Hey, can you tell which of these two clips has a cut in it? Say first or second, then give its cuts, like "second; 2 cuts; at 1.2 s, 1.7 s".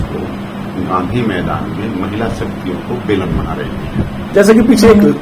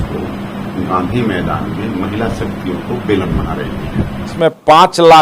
second; 1 cut; at 4.3 s